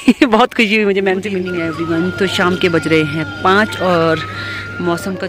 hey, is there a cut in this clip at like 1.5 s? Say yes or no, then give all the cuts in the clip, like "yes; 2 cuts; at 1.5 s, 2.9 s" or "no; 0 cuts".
yes; 1 cut; at 1.5 s